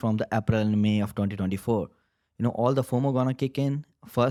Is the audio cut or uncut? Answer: uncut